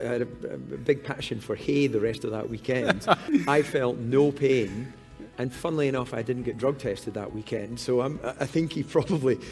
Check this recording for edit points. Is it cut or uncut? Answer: cut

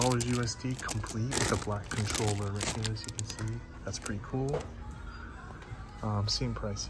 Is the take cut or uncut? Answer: uncut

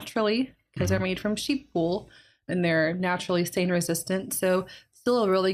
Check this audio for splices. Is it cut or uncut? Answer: uncut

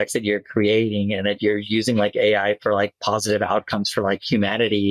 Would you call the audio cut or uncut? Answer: uncut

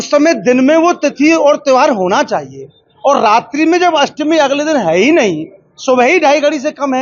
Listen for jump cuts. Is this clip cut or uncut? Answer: uncut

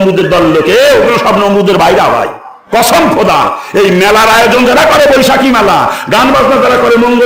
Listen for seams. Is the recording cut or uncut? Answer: uncut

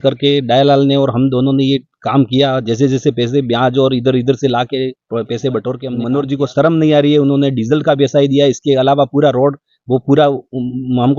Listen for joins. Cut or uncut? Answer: cut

